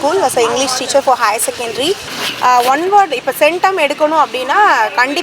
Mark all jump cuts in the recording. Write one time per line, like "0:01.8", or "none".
0:02.1